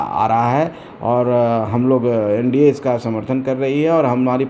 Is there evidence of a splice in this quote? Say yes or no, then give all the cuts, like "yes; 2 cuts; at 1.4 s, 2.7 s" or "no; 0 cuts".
no; 0 cuts